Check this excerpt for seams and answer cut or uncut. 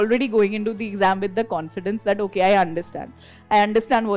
uncut